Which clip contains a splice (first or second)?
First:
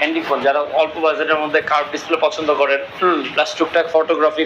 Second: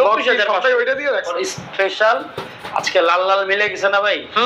second